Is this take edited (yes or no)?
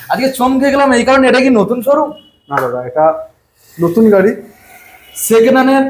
no